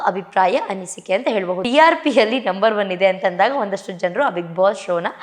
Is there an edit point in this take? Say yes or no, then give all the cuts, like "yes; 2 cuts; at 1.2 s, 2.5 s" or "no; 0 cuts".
yes; 1 cut; at 1.6 s